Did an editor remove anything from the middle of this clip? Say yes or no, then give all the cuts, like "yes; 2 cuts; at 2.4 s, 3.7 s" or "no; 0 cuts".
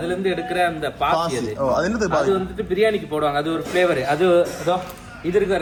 no; 0 cuts